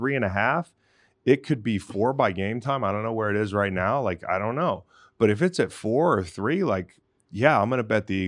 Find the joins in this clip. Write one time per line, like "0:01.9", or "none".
none